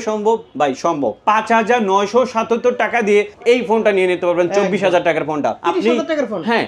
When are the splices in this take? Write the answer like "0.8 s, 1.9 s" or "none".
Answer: 1.2 s, 3.3 s, 5.6 s